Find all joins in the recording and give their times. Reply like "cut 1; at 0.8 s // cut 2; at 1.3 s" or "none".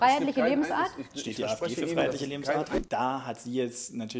cut 1; at 2.7 s